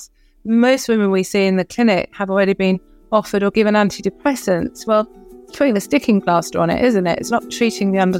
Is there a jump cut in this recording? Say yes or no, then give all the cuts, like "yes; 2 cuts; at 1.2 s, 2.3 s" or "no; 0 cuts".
no; 0 cuts